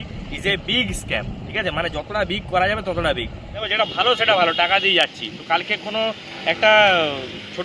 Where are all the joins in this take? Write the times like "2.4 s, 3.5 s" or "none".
3.7 s